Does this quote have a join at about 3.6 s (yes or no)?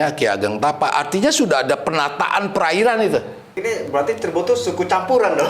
yes